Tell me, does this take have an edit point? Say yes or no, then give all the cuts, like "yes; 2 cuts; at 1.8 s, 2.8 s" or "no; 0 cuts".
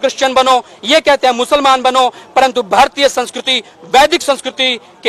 no; 0 cuts